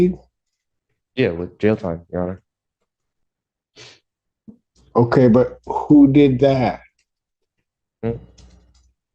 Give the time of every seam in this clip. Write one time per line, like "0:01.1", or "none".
none